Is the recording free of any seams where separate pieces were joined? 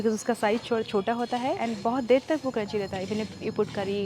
no; 1 cut; at 1.6 s

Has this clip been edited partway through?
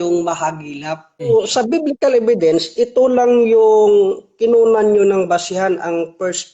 yes; 1 cut; at 1.3 s

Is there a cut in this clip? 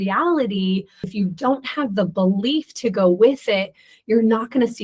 yes; 1 cut; at 1.1 s

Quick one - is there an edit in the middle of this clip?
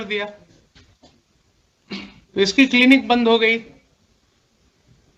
no; 0 cuts

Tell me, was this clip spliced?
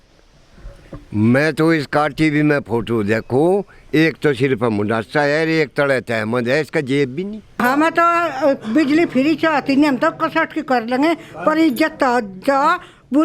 yes; 1 cut; at 7.6 s

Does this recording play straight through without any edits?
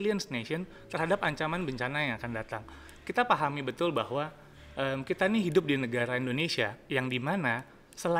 yes; 0 cuts

